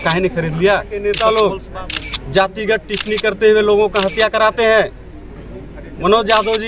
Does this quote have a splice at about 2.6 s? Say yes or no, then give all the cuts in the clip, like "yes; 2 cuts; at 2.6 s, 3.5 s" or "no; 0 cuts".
no; 1 cut; at 1.0 s